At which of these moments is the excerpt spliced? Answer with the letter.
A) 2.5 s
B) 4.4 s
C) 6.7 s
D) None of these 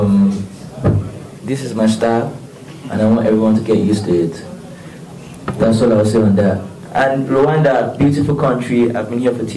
C